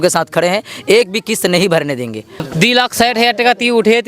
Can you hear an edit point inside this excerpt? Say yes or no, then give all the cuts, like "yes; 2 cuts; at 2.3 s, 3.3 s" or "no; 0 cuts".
yes; 1 cut; at 2.5 s